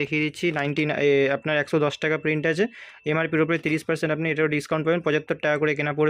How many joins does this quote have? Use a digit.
0